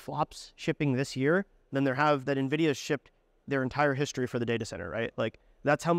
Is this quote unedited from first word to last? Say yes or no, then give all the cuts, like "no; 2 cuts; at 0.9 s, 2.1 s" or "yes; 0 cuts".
yes; 0 cuts